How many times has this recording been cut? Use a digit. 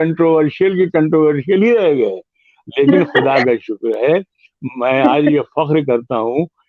0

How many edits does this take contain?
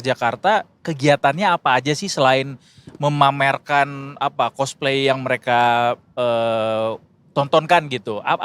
0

